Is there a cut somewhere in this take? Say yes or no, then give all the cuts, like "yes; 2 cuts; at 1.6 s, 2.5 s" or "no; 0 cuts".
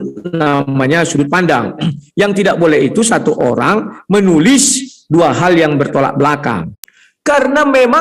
yes; 1 cut; at 6.7 s